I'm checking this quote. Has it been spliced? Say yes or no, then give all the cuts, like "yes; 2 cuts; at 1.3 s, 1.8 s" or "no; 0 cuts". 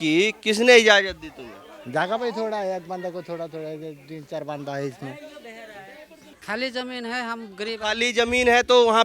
yes; 1 cut; at 6.3 s